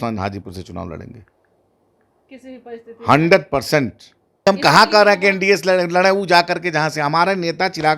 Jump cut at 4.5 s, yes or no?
yes